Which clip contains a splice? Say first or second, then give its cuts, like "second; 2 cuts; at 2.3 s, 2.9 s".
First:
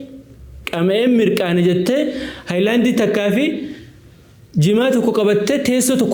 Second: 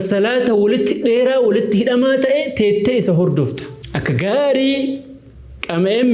second; 1 cut; at 3.7 s